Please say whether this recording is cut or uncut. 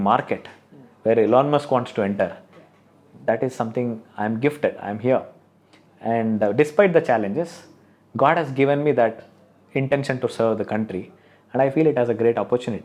uncut